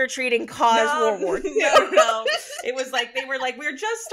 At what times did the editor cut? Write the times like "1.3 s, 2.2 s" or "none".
none